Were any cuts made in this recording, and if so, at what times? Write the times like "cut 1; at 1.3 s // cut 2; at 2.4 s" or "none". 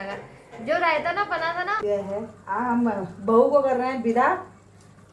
cut 1; at 1.8 s